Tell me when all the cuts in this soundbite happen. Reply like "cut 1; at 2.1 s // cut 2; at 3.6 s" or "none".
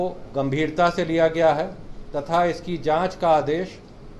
none